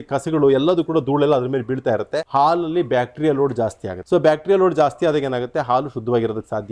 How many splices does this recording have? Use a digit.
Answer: 2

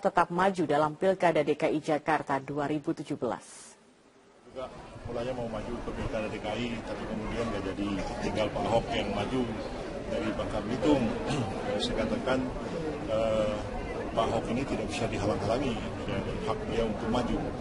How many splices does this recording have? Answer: 1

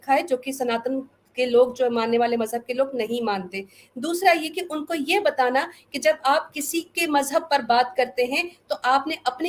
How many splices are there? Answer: 0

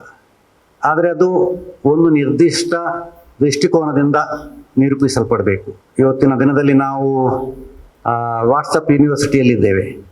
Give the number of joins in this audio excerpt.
1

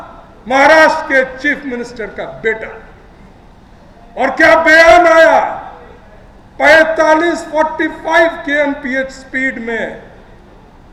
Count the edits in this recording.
0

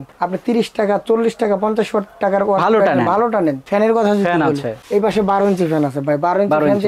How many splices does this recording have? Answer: 1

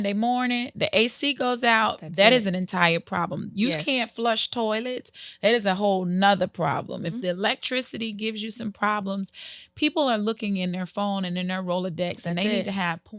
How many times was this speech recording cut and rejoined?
0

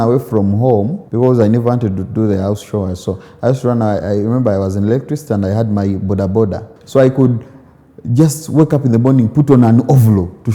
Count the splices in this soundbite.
2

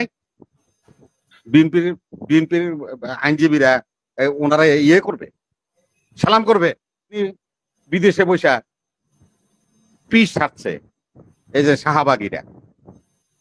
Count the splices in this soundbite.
1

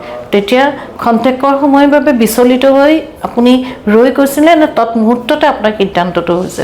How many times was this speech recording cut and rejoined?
0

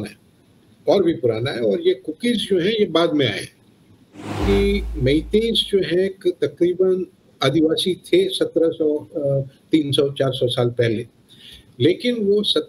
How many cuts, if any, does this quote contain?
1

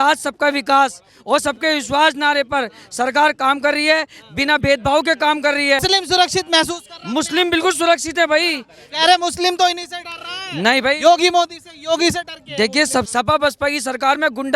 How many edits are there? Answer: 2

